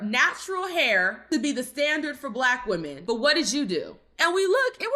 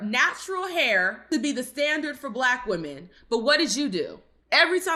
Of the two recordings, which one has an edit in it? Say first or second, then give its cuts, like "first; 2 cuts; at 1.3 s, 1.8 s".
first; 2 cuts; at 2.9 s, 4.1 s